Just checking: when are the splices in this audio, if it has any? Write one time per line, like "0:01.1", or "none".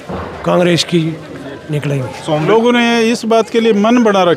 0:02.4